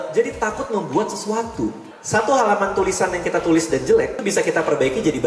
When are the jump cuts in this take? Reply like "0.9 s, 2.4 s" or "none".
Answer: 1.9 s, 4.2 s